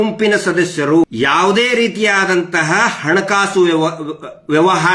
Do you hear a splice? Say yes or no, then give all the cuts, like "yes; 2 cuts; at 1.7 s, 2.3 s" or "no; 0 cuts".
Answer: yes; 1 cut; at 1.1 s